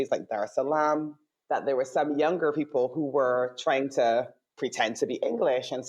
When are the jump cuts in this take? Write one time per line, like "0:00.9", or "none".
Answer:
none